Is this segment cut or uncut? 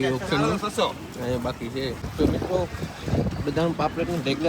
cut